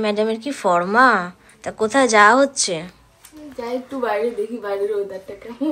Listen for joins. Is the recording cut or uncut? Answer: uncut